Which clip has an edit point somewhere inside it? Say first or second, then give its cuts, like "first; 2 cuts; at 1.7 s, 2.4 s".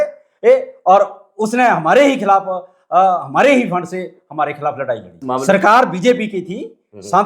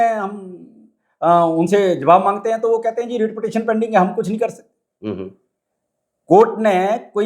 first; 1 cut; at 5.2 s